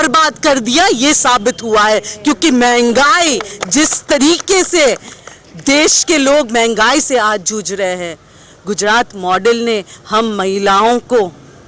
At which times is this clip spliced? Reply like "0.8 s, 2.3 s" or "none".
none